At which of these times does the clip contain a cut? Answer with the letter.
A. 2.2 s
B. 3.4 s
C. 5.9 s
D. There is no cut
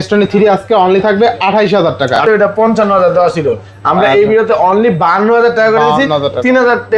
A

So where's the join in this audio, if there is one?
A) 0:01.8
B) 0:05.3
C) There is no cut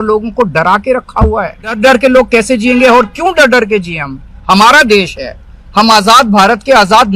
A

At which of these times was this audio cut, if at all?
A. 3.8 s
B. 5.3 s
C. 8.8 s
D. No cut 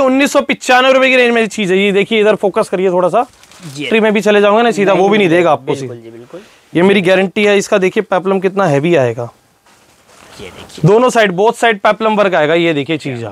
A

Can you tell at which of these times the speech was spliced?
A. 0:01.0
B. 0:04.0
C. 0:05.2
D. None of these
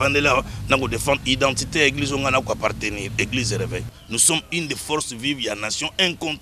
B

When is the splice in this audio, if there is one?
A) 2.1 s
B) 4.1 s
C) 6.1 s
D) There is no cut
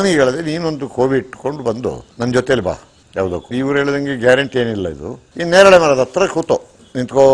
A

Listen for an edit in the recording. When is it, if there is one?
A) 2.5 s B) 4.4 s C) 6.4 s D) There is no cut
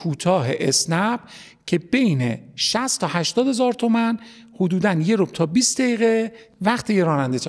C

